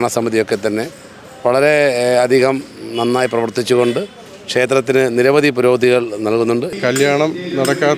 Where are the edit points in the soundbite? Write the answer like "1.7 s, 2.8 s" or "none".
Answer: 6.7 s